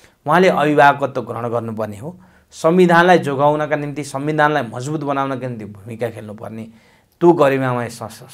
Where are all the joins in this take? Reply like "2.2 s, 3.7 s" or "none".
none